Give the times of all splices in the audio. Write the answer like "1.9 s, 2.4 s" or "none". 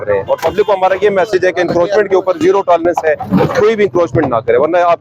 none